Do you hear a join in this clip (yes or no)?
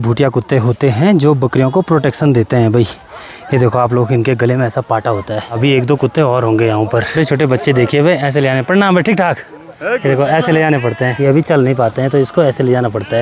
no